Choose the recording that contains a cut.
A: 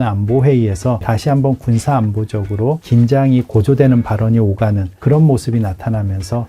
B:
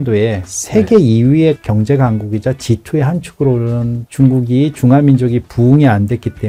A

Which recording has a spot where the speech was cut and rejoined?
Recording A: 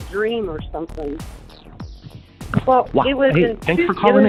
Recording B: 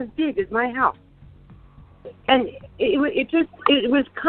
B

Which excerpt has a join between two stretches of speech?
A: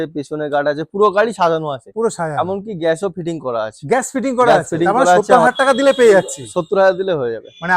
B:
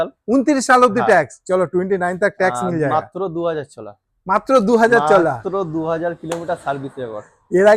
A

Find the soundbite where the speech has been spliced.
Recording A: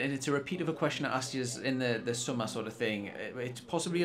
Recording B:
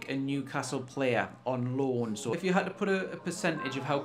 B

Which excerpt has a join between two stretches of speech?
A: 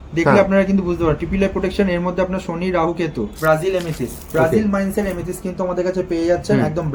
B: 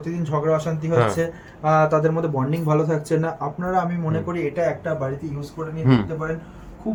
A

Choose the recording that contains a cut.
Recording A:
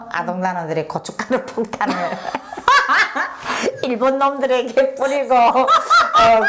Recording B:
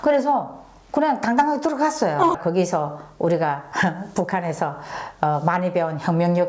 B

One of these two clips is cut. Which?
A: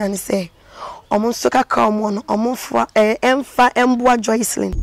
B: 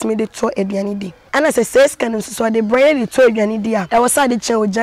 B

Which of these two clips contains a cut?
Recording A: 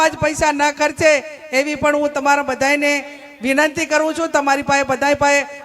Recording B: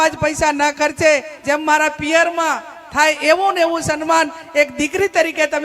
B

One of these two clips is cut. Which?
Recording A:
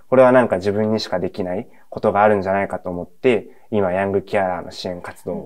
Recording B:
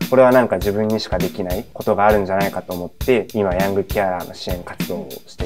B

